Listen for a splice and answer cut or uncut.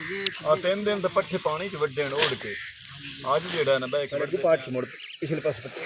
cut